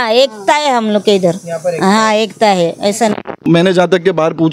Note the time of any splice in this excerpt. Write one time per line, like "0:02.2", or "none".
0:03.4